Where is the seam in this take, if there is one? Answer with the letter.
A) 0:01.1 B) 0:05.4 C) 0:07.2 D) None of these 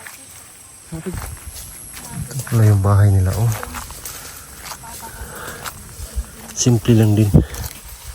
A